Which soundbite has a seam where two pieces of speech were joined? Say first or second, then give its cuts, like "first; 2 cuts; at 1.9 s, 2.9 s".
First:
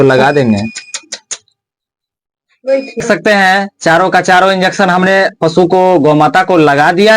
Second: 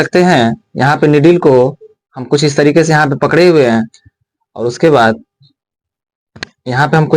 first; 1 cut; at 3.0 s